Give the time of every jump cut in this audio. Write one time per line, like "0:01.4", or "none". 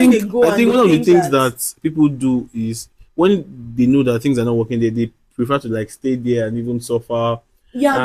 none